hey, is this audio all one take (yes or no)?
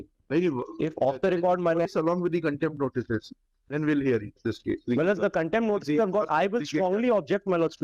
no